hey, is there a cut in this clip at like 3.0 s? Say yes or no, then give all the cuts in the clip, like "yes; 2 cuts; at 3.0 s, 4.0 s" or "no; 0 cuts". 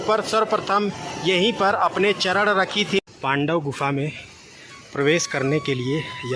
yes; 1 cut; at 3.0 s